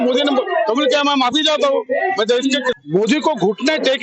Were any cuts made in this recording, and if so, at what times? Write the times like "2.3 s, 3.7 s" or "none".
2.7 s